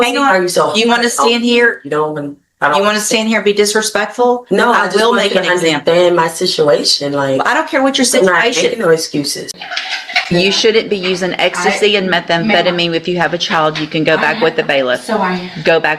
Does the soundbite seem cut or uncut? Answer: cut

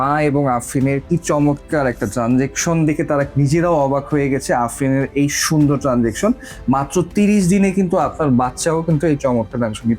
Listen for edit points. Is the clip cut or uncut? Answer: cut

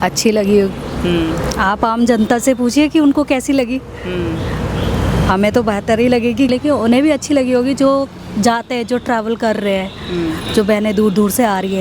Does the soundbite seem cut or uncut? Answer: uncut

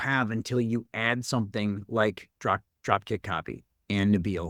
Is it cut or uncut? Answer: uncut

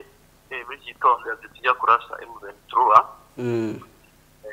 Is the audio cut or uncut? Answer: uncut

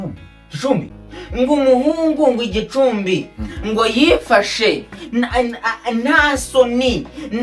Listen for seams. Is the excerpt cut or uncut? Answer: cut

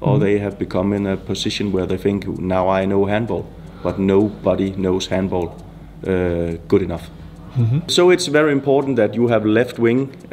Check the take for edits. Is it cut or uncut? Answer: cut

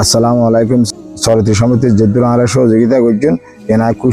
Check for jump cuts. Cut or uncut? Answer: cut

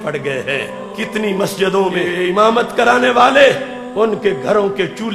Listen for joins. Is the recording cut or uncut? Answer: cut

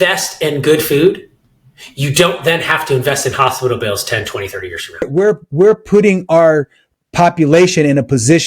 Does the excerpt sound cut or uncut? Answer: cut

